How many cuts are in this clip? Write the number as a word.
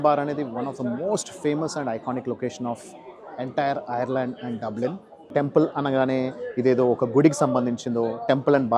one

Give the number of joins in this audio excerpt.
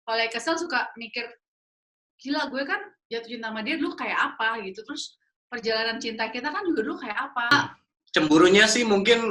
one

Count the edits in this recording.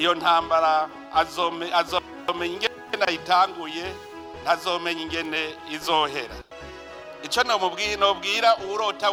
zero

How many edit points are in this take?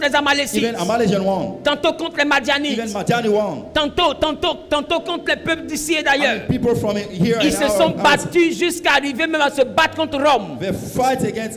zero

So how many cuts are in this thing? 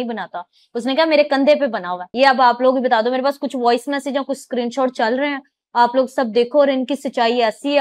one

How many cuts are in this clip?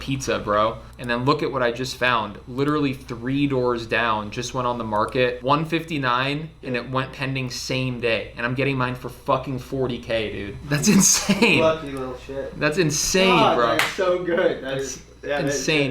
three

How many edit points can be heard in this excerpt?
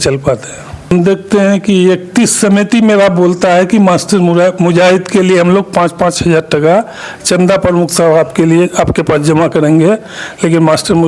one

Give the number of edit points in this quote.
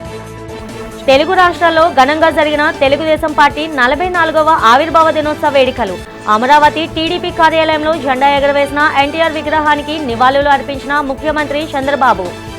one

